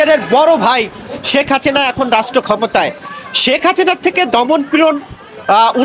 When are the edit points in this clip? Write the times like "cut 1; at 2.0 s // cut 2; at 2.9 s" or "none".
none